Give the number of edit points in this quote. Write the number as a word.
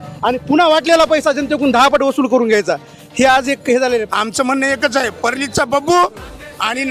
one